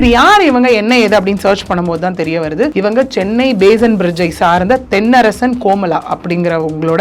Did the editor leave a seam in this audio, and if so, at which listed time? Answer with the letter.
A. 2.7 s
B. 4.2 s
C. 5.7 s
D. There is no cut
A